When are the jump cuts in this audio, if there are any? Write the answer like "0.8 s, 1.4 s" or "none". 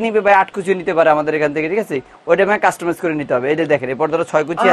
none